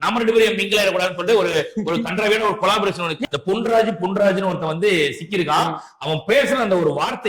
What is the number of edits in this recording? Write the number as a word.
one